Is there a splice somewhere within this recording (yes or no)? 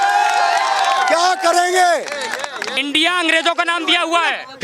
yes